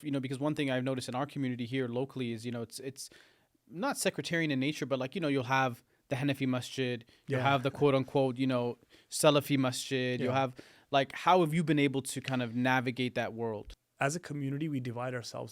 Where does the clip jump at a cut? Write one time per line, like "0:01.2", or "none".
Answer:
0:13.7